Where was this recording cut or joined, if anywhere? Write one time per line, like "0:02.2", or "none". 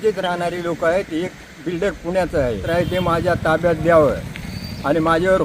0:02.6